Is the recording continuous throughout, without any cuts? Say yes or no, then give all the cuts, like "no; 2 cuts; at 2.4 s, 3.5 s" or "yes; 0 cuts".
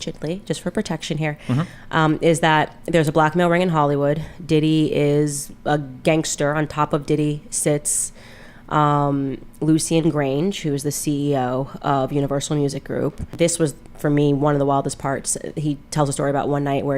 no; 1 cut; at 13.3 s